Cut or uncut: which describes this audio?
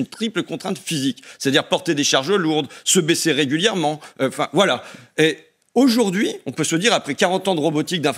uncut